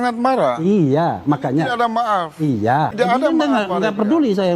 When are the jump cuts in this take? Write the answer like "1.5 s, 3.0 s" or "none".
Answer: 2.9 s